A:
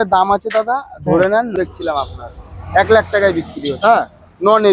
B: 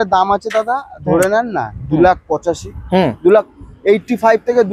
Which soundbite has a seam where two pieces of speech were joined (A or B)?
A